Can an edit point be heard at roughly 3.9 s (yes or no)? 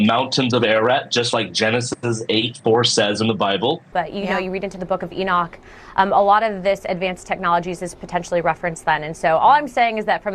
yes